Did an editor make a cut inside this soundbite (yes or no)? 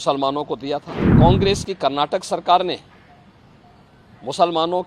yes